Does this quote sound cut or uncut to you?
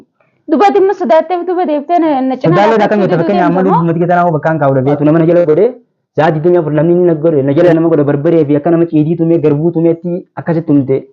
cut